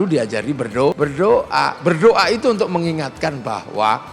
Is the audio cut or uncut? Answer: cut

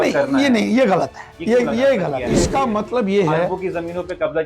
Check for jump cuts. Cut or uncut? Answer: cut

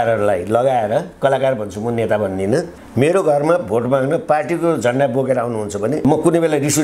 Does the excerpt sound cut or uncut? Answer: cut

